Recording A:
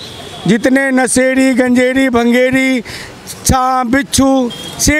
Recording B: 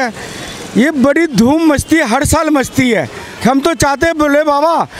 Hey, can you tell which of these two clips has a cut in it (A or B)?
B